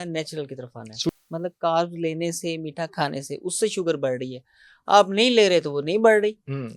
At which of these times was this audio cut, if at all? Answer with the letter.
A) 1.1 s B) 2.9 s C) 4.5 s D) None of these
A